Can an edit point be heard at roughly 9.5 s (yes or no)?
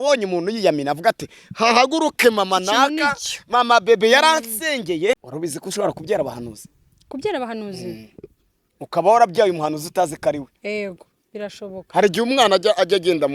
no